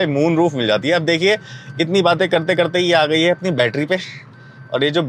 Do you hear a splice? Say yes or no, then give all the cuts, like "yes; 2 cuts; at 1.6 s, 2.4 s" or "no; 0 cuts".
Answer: no; 0 cuts